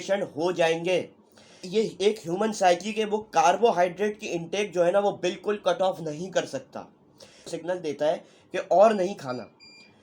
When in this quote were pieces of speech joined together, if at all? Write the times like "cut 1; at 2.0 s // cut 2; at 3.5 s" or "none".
cut 1; at 1.6 s // cut 2; at 7.4 s